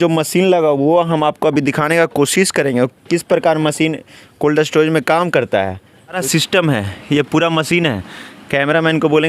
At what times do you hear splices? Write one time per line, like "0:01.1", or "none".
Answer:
0:06.2